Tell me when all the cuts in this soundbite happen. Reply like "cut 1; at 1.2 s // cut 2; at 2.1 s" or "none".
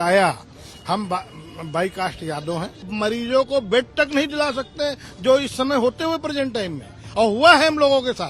cut 1; at 2.8 s

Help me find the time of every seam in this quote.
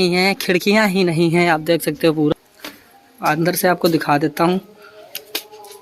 cut 1; at 2.3 s

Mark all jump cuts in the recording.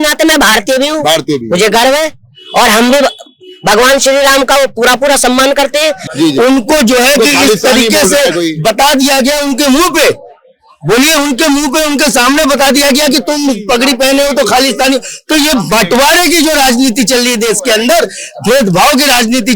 cut 1; at 6.1 s

